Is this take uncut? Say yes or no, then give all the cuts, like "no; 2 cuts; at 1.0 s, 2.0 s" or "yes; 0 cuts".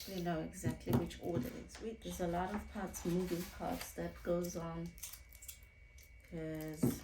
no; 1 cut; at 1.7 s